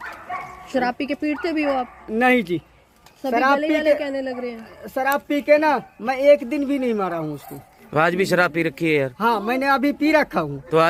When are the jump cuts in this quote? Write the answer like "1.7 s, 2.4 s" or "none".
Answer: none